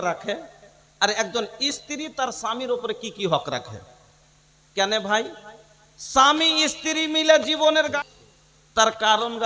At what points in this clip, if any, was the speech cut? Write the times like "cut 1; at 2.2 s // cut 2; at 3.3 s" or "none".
cut 1; at 7.9 s